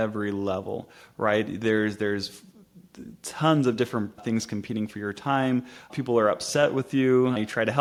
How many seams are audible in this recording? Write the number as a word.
zero